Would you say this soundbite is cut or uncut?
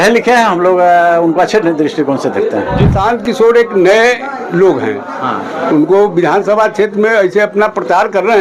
cut